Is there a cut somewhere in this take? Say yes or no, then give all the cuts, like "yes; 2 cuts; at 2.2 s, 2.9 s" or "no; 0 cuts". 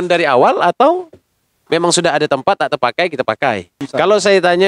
yes; 1 cut; at 3.7 s